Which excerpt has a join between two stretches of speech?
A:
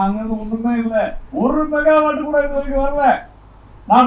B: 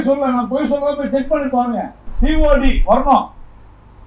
B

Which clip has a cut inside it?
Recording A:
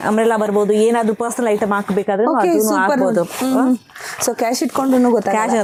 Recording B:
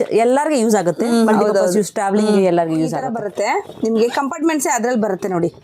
B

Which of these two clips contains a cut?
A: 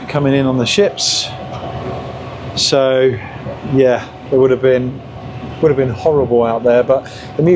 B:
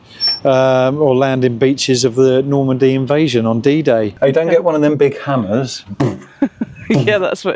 B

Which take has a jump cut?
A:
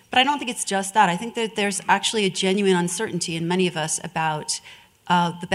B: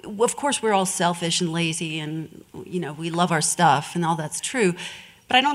B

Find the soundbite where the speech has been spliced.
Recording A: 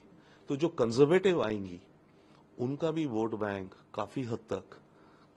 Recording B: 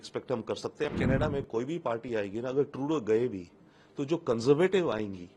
B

